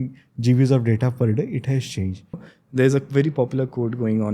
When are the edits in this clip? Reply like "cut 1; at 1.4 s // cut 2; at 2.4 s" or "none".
cut 1; at 2.5 s